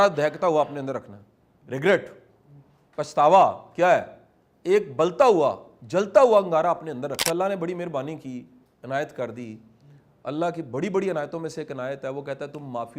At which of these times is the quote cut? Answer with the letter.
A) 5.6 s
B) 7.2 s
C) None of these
B